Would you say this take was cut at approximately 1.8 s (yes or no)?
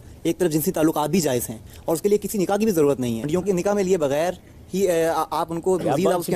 no